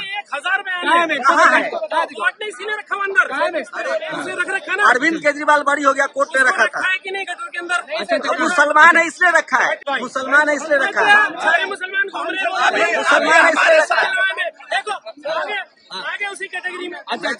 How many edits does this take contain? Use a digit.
2